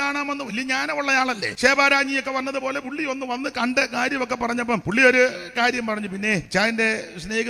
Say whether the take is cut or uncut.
cut